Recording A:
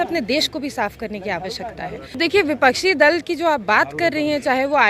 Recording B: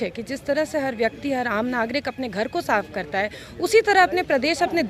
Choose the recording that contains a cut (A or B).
A